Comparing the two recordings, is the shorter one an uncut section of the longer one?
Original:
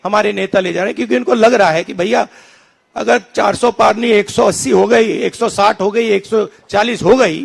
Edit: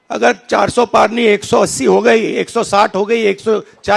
yes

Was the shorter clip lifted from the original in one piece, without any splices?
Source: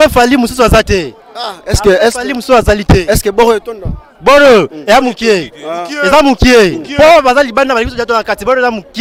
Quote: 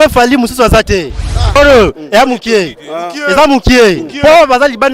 no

